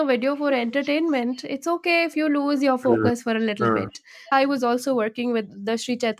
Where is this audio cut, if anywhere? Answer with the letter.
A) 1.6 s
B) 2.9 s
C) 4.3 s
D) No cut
C